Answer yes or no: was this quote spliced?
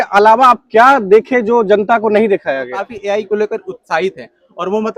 yes